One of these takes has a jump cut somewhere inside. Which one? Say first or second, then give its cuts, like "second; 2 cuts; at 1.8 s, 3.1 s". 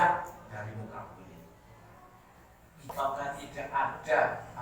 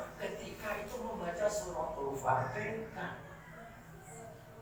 first; 1 cut; at 2.9 s